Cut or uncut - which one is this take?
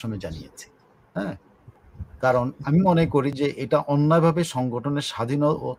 uncut